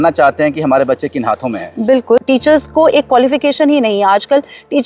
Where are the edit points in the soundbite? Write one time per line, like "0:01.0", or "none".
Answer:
0:02.2